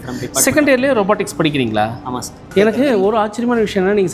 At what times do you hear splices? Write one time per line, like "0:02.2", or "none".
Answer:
0:02.5